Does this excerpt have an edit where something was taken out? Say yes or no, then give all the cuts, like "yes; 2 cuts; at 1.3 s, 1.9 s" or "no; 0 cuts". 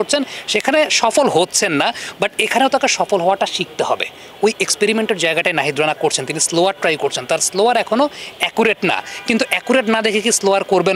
no; 0 cuts